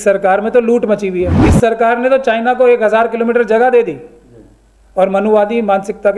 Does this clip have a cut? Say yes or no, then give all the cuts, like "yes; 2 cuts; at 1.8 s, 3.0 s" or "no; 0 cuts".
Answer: yes; 1 cut; at 1.4 s